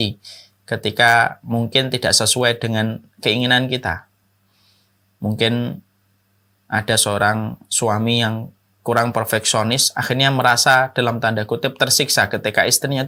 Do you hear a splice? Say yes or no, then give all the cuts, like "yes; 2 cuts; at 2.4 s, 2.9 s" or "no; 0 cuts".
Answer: no; 0 cuts